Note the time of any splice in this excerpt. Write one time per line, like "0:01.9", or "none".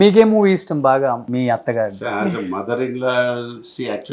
0:01.2

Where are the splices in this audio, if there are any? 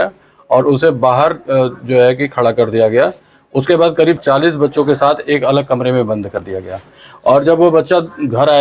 0:04.2

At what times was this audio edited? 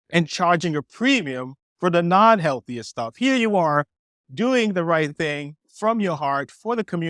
none

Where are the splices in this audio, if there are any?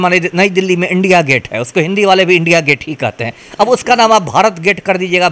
none

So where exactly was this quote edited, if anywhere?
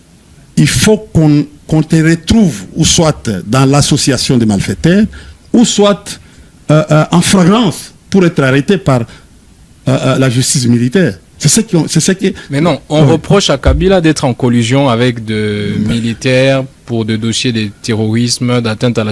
none

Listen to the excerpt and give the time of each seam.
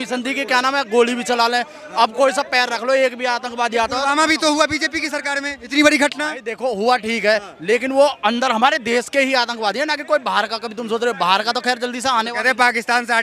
none

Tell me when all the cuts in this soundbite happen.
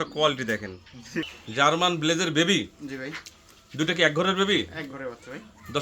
0:01.3

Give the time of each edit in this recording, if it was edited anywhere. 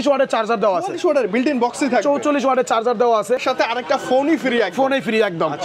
0:03.4

